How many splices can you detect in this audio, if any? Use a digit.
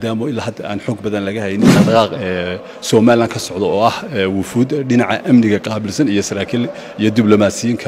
1